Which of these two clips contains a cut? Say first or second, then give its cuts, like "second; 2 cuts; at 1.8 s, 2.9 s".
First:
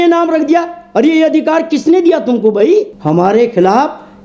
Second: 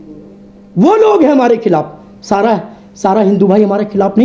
first; 1 cut; at 2.9 s